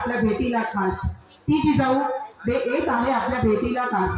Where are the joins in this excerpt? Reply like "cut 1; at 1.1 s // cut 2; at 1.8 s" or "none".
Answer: none